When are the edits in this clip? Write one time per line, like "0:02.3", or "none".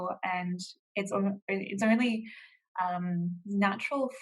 none

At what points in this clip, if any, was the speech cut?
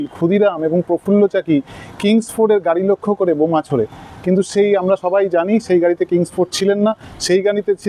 none

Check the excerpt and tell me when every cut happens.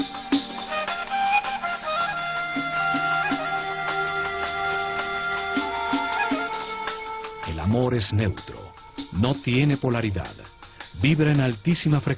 none

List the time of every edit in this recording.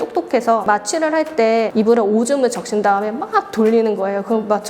0:01.7

